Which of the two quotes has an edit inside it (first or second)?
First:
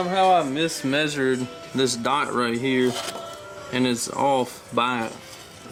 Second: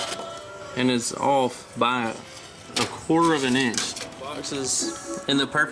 second